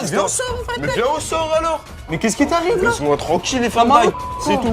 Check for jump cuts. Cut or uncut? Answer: cut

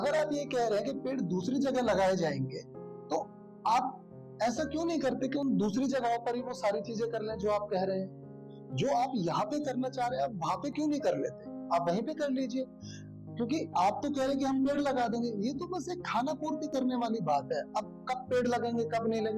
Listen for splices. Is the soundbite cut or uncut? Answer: uncut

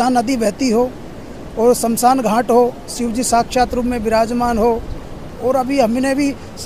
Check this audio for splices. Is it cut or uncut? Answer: cut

